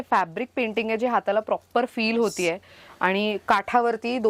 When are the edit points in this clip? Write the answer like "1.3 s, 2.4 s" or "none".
none